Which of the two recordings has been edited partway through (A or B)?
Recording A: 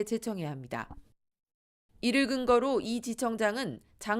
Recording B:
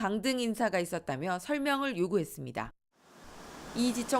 B